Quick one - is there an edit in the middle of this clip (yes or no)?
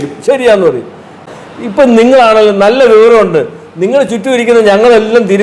yes